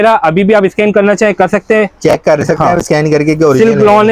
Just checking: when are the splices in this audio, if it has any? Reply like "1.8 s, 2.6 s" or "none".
none